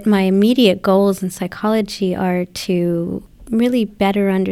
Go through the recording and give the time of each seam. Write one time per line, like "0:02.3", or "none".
0:03.2